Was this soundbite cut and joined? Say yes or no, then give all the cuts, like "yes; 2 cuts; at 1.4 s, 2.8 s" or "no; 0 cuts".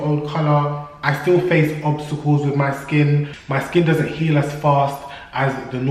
no; 0 cuts